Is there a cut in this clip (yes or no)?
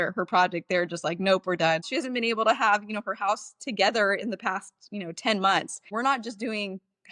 yes